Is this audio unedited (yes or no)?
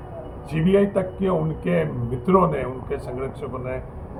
yes